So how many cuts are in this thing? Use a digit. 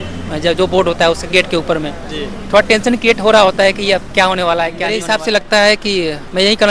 1